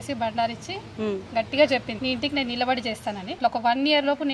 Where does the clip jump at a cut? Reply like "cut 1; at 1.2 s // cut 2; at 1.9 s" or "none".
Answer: cut 1; at 1.9 s // cut 2; at 3.4 s